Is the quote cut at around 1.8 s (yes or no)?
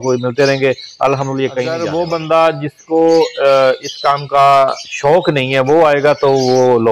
yes